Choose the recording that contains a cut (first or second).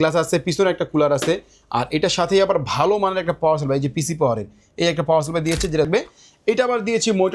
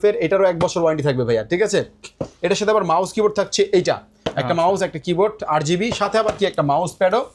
first